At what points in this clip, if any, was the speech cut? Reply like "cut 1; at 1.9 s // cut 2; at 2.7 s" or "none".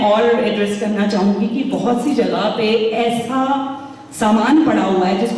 none